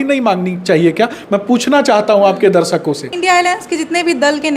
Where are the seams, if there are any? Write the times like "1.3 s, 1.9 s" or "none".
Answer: 3.1 s